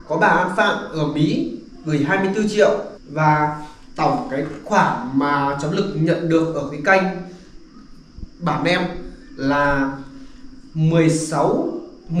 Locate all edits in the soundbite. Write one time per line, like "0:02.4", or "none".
0:03.0